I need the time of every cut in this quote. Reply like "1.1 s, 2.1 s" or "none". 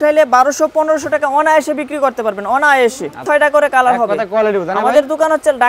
3.2 s